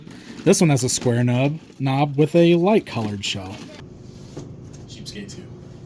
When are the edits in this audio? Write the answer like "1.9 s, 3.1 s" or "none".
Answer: 3.8 s